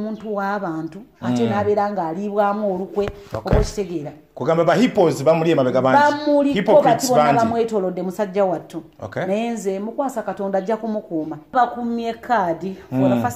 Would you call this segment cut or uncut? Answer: cut